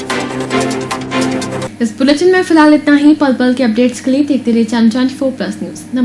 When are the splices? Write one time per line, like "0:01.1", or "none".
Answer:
none